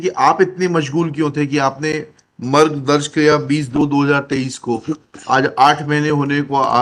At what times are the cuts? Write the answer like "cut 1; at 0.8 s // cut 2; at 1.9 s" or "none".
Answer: none